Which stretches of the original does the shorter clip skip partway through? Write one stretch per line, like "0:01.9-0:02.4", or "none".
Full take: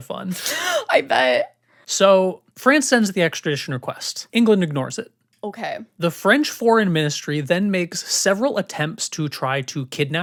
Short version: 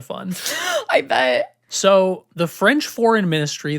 0:01.6-0:01.8
0:02.4-0:05.9